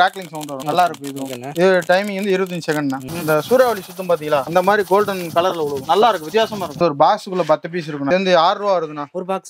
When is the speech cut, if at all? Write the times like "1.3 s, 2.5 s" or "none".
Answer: 3.1 s, 6.8 s, 8.1 s